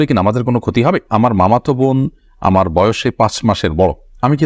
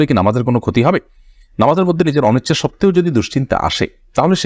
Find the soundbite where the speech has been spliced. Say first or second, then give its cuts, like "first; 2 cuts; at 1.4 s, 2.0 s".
first; 1 cut; at 1.0 s